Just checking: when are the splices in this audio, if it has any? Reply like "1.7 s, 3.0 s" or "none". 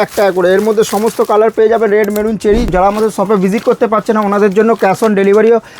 2.7 s